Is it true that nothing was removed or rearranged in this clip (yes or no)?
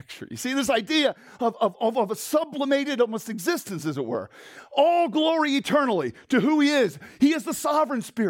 yes